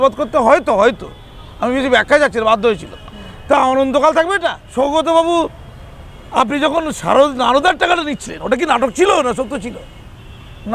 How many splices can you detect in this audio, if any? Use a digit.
1